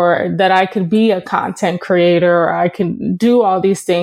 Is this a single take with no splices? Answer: yes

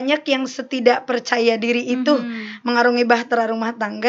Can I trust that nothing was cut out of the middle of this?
yes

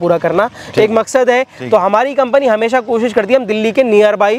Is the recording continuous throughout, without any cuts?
yes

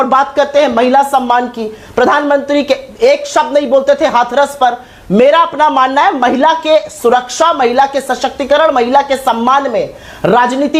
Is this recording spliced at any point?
no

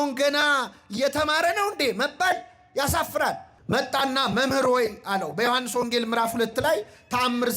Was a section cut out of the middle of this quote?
yes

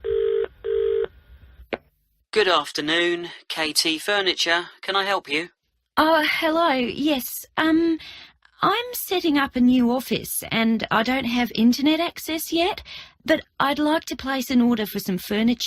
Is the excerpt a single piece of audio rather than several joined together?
no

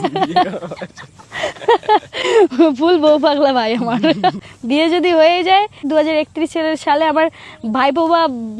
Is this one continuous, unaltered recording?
no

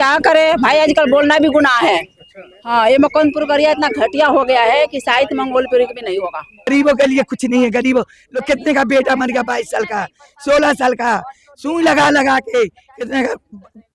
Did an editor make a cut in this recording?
yes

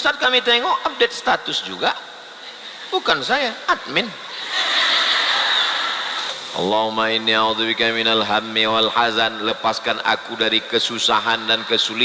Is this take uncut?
no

